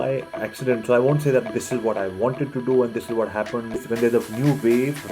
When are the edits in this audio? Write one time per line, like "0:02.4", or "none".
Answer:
0:03.8